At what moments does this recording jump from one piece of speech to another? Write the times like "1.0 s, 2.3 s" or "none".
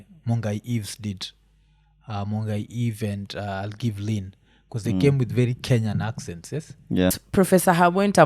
7.2 s